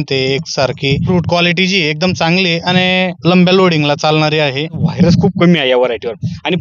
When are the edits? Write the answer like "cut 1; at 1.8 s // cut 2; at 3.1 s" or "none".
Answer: cut 1; at 1.0 s // cut 2; at 3.2 s // cut 3; at 4.8 s